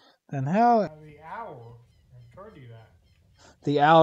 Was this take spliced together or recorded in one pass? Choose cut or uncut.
cut